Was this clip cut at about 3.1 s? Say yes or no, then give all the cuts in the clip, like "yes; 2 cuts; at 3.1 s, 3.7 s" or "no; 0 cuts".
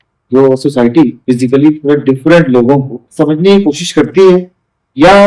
yes; 2 cuts; at 1.2 s, 3.1 s